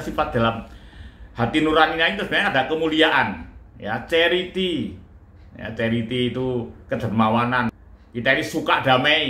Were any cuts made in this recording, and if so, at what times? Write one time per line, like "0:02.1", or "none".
none